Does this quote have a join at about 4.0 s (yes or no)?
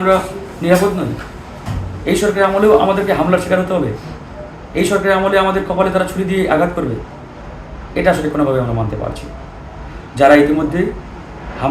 no